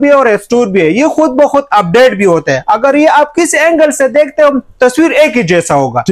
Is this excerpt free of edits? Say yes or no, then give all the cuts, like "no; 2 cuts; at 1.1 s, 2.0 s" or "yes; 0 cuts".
yes; 0 cuts